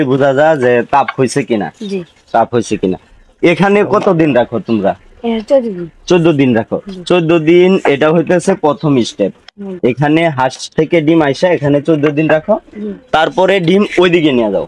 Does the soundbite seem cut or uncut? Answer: uncut